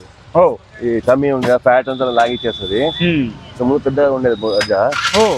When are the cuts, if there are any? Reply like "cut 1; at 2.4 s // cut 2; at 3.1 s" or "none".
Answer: none